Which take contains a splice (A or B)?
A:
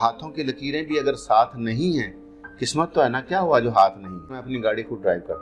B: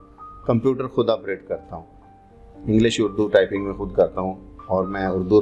A